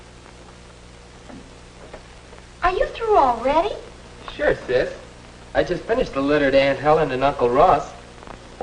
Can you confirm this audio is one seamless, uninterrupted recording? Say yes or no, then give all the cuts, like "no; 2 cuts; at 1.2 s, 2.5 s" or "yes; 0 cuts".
yes; 0 cuts